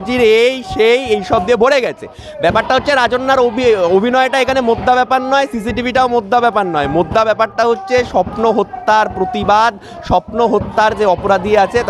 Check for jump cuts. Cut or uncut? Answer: uncut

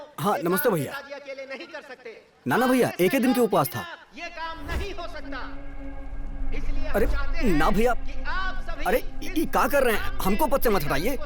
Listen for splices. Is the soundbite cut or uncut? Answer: uncut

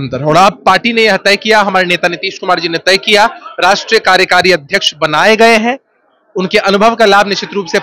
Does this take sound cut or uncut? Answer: uncut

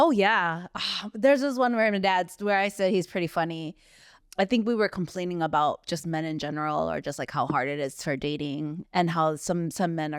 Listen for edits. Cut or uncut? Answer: cut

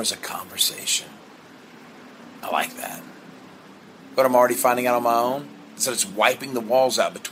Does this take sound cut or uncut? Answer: cut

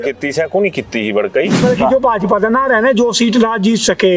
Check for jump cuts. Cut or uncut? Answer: cut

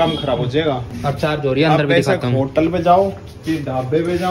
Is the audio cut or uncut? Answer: cut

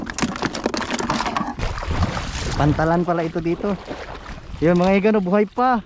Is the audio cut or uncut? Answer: cut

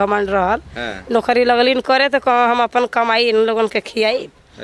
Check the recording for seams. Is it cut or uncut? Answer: uncut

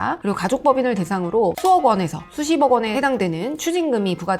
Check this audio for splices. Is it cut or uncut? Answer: uncut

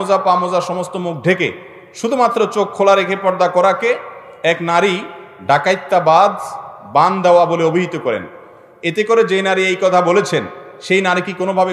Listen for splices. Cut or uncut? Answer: uncut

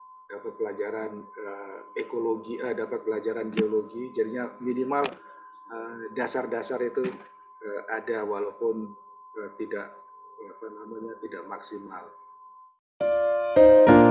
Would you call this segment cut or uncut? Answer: cut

